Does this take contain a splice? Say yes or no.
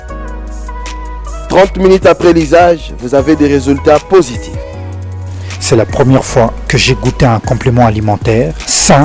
yes